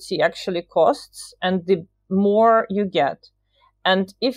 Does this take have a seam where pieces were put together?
no; 0 cuts

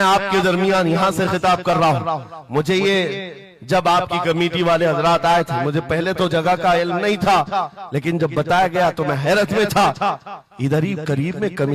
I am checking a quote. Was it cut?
no; 0 cuts

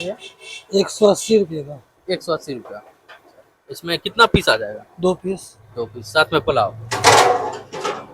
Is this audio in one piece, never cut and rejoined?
yes; 0 cuts

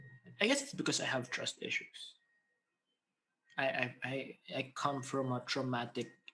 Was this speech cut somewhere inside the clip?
no; 0 cuts

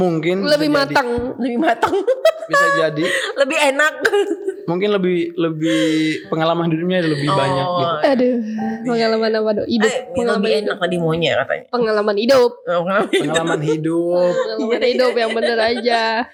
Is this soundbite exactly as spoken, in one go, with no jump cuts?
yes; 0 cuts

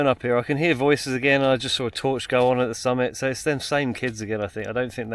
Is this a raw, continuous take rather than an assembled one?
yes; 0 cuts

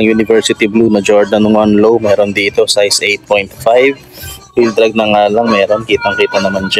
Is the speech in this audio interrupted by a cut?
no; 0 cuts

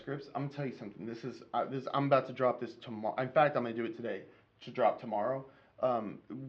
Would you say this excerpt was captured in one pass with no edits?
yes; 0 cuts

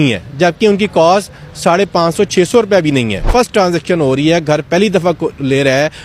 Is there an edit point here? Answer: yes; 1 cut; at 3.2 s

